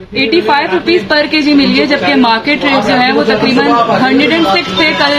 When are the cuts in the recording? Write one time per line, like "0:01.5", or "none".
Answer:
none